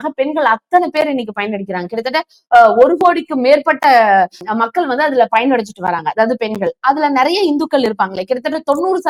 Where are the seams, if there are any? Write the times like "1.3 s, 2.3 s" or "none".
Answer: none